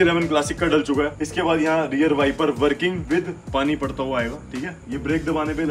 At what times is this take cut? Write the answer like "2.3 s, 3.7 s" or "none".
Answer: none